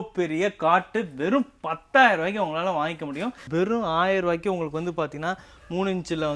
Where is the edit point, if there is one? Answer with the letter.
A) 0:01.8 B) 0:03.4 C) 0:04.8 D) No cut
B